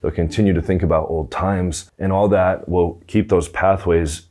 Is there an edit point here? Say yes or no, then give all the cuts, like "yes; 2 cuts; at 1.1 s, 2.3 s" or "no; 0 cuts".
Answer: yes; 1 cut; at 1.9 s